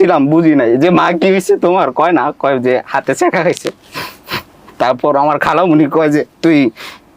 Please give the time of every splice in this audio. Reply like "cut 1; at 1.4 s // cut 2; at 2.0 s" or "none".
none

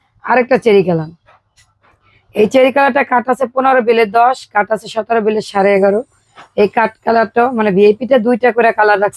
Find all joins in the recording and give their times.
none

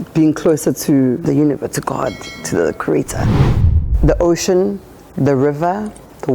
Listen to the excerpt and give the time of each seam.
cut 1; at 1.2 s // cut 2; at 3.5 s

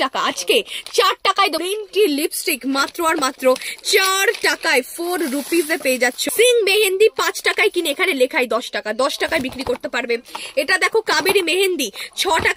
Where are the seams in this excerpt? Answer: cut 1; at 1.6 s // cut 2; at 6.2 s

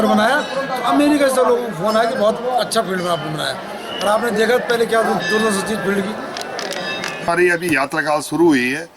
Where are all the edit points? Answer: cut 1; at 7.3 s

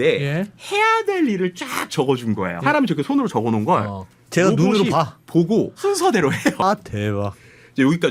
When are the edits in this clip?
cut 1; at 2.6 s // cut 2; at 5.7 s // cut 3; at 6.6 s

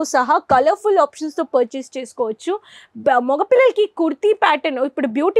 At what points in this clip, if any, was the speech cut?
none

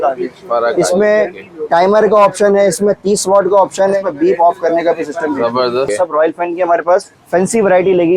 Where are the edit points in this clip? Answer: cut 1; at 4.0 s // cut 2; at 5.9 s // cut 3; at 7.2 s

